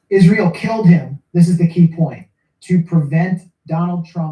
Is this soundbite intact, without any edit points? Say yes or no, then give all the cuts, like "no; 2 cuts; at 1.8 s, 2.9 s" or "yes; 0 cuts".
yes; 0 cuts